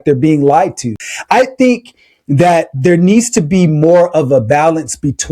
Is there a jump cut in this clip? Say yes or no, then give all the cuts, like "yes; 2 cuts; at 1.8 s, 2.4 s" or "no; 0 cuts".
yes; 1 cut; at 1.0 s